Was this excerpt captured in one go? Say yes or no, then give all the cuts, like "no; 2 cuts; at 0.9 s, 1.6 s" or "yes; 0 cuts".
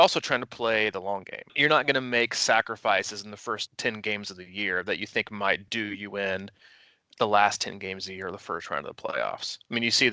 no; 2 cuts; at 1.5 s, 3.7 s